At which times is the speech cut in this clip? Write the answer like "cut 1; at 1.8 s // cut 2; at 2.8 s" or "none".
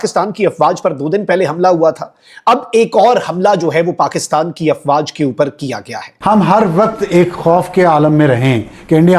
cut 1; at 6.0 s